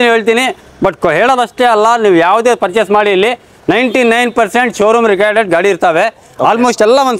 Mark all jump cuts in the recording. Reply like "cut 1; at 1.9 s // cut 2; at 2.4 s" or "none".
none

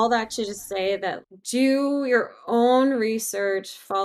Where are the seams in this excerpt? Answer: cut 1; at 1.2 s

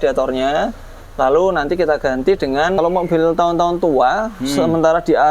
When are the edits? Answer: cut 1; at 2.8 s

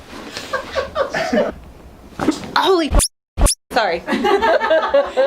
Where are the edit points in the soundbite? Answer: cut 1; at 1.5 s

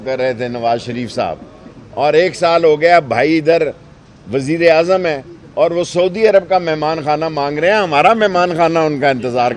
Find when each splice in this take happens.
none

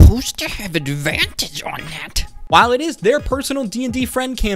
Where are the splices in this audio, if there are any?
cut 1; at 2.4 s

